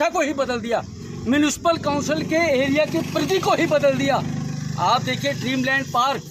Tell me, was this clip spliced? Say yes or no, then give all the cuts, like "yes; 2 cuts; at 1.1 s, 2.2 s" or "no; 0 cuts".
no; 0 cuts